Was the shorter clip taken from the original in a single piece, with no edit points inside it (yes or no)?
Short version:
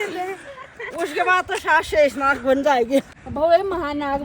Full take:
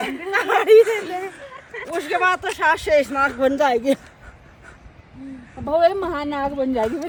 no